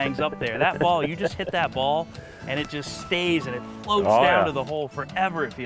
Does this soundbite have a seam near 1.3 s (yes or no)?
no